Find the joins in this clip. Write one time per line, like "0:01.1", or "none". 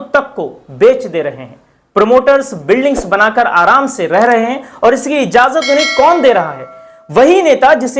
none